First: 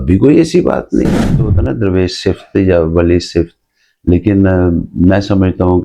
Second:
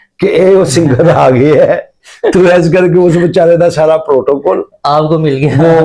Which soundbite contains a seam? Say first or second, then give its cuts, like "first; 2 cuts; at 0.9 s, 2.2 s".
first; 1 cut; at 1.4 s